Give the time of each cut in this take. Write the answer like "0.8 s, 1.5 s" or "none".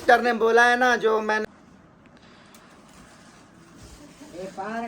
1.4 s

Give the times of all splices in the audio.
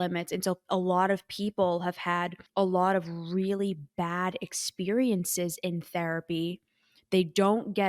2.4 s

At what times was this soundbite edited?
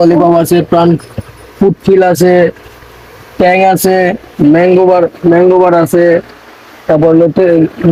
none

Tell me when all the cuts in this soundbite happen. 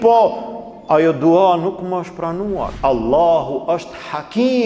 2.7 s

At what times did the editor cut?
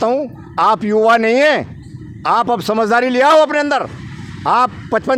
none

